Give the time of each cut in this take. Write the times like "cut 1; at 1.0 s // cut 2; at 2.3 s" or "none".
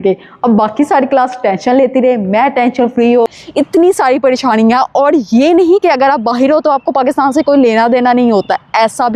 cut 1; at 3.3 s